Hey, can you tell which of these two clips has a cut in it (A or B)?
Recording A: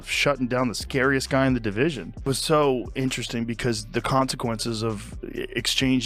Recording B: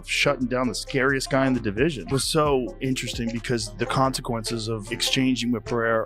B